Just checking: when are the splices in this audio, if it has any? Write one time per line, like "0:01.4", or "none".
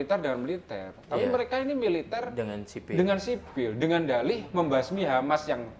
none